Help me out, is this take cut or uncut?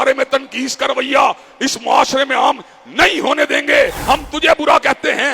cut